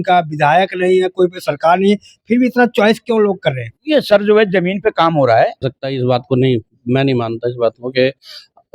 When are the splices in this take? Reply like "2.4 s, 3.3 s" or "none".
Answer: 5.7 s

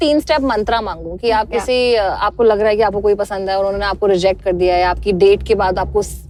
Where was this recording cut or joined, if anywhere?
none

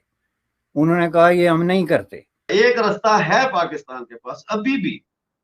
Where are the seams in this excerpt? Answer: 2.4 s

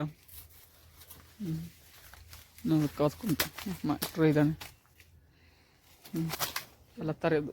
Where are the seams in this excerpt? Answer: 6.3 s

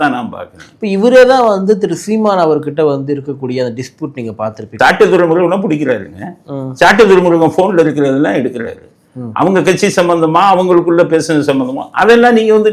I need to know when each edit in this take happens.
4.6 s

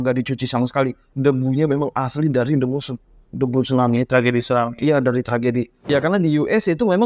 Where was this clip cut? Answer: 5.8 s

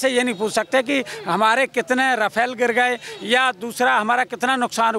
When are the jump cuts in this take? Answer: none

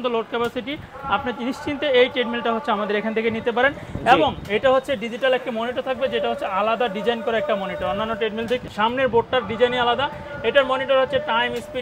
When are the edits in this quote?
8.7 s

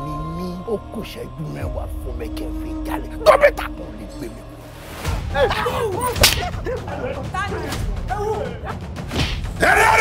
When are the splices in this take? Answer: 7.5 s

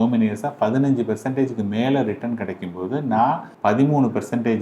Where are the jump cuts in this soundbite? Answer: 3.5 s

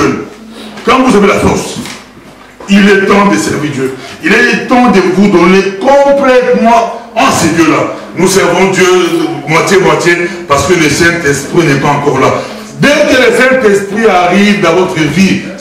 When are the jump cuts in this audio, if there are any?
none

